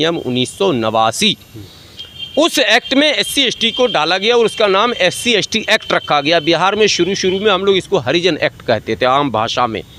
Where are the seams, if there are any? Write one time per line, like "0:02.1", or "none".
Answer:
none